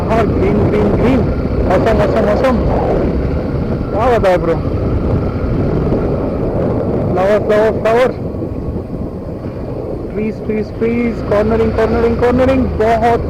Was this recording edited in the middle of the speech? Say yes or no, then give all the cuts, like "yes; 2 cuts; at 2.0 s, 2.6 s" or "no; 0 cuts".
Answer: no; 0 cuts